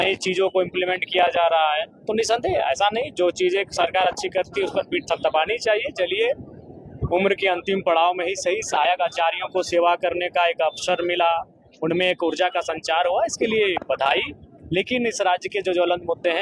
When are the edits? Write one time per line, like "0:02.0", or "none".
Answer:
none